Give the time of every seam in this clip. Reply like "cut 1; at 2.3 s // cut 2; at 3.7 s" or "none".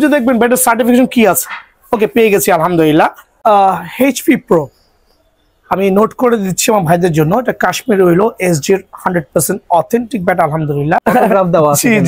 cut 1; at 3.4 s // cut 2; at 11.0 s